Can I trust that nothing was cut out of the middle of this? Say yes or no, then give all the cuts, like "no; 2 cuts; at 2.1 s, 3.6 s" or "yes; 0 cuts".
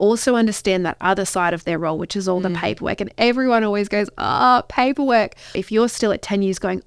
no; 1 cut; at 5.6 s